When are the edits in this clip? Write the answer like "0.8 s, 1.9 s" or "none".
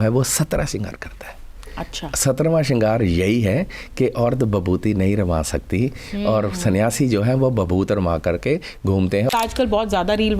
9.3 s